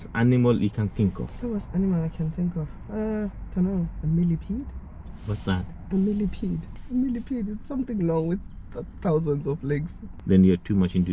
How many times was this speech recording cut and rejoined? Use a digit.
3